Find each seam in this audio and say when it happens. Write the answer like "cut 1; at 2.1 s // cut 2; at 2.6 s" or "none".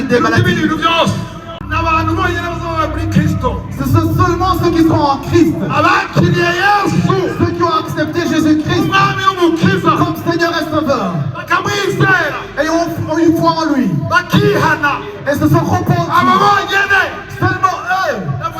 cut 1; at 1.7 s

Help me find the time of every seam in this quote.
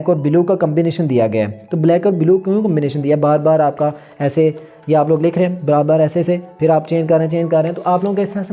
none

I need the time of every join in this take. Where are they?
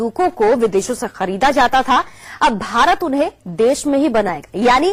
none

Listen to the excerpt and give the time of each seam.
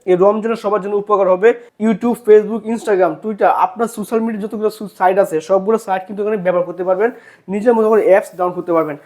cut 1; at 1.7 s

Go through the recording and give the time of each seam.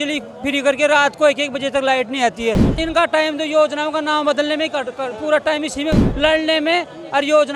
cut 1; at 2.8 s // cut 2; at 6.1 s

